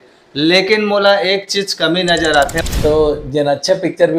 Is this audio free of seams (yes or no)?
no